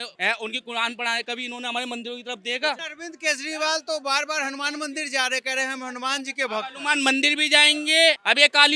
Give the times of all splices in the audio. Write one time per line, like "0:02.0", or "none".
0:02.8

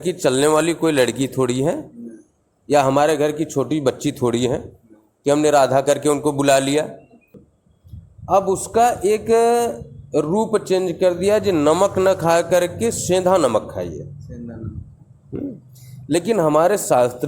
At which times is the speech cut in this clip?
0:07.2

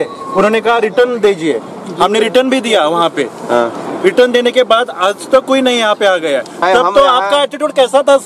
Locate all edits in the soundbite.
0:06.6

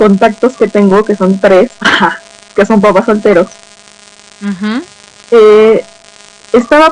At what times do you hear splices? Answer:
0:01.5

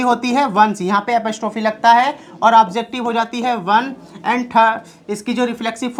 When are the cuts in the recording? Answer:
none

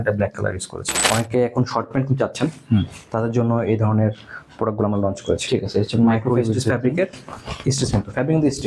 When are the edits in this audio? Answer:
0:01.0

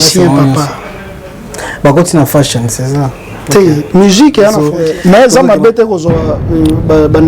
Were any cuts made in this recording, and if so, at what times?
0:04.7

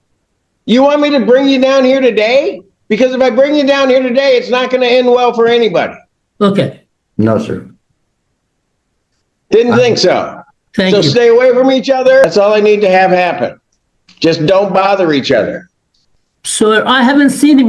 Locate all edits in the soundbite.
0:12.2

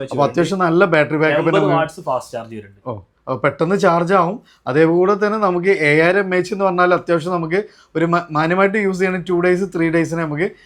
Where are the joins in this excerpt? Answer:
none

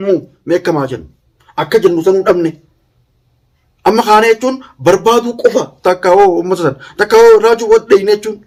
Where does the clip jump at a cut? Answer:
none

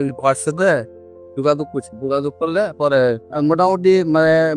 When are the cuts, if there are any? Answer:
0:03.2

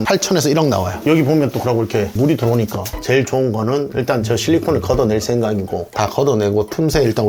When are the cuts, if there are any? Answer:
0:00.9
0:02.9

